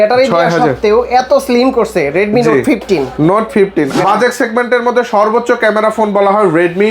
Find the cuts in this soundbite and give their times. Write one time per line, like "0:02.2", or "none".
0:03.9